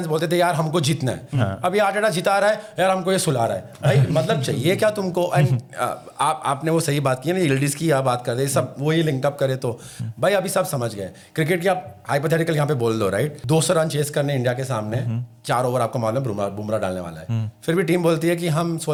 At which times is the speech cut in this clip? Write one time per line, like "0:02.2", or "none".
none